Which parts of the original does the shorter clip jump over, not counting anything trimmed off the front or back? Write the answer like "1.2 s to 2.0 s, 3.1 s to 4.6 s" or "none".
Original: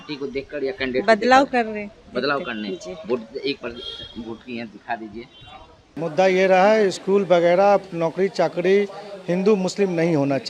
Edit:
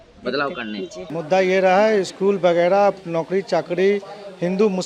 2.9 s to 5.9 s